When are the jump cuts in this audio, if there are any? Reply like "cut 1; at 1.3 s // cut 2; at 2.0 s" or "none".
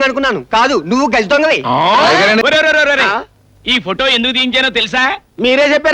cut 1; at 2.4 s